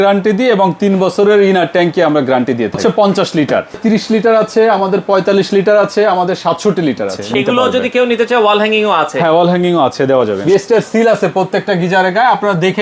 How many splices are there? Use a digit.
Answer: 4